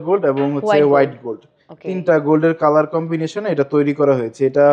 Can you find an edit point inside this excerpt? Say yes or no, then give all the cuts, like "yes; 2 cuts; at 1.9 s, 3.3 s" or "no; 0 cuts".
no; 0 cuts